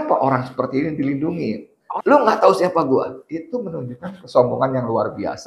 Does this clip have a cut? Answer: yes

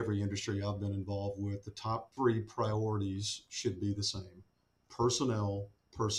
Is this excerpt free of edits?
no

